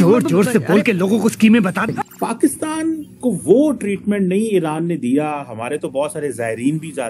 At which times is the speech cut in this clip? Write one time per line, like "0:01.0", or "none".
0:01.8